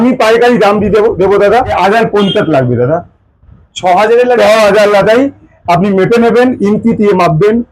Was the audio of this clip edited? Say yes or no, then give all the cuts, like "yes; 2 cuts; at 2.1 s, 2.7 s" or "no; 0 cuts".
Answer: yes; 1 cut; at 1.7 s